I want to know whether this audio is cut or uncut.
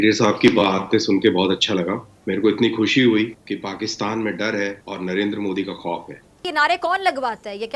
cut